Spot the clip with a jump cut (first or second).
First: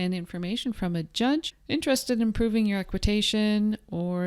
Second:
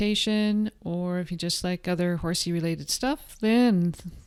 first